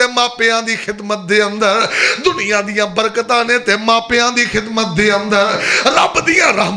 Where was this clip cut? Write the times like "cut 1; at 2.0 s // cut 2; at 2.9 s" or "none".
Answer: none